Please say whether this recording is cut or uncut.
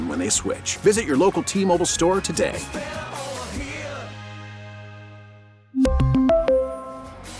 uncut